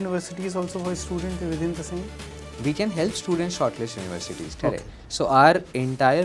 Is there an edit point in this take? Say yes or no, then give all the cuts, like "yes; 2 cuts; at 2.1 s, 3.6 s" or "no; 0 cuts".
no; 0 cuts